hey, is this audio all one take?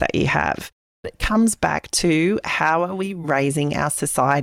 no; 1 cut; at 1.2 s

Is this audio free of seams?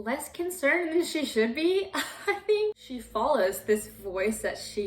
no; 1 cut; at 2.8 s

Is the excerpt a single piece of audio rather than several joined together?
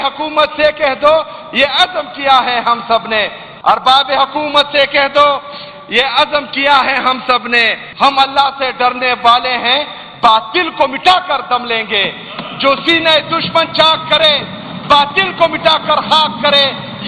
no; 2 cuts; at 3.4 s, 7.8 s

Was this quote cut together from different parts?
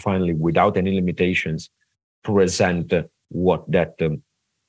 no; 0 cuts

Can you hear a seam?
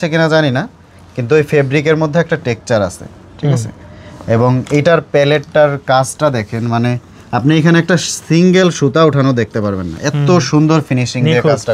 no; 0 cuts

